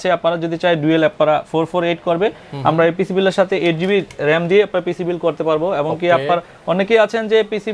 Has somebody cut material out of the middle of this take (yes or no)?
no